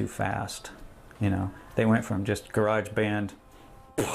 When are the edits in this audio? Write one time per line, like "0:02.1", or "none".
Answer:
none